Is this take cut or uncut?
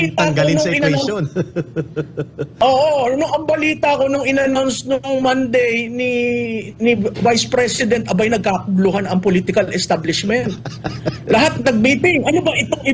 uncut